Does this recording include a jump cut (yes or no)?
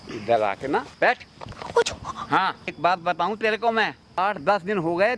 yes